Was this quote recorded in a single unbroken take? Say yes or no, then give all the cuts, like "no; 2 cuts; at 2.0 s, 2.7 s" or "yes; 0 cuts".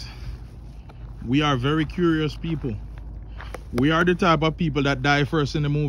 yes; 0 cuts